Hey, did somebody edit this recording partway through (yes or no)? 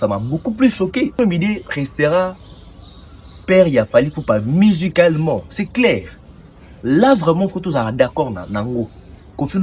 yes